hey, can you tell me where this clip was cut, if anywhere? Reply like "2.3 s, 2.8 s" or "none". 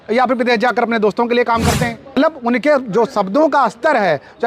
2.2 s

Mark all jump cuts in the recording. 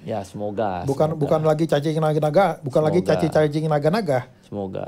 none

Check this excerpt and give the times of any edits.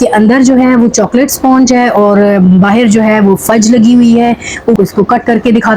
4.8 s

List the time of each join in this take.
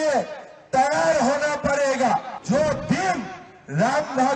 2.3 s

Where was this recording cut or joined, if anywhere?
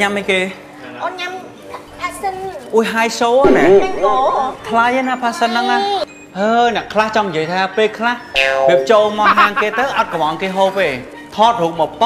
6.0 s

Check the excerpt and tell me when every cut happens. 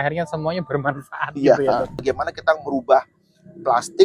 2.0 s

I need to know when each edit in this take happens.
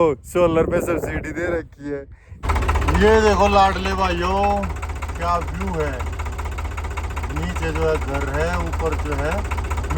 2.4 s

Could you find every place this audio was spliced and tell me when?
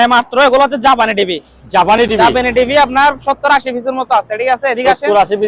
none

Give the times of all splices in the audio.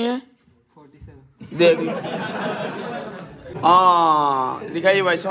3.5 s

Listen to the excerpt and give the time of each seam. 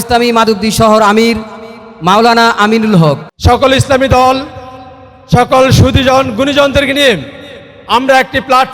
3.3 s

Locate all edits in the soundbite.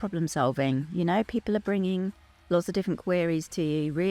none

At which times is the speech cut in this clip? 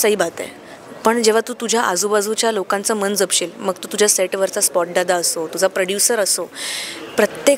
none

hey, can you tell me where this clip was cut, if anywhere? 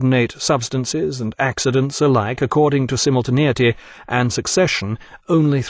none

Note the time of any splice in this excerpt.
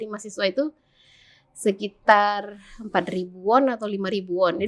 none

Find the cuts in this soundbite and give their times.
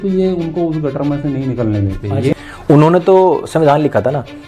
2.3 s

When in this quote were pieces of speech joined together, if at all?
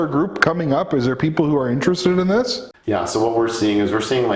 2.7 s

